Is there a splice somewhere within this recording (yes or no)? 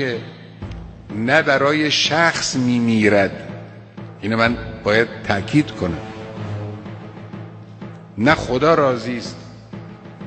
no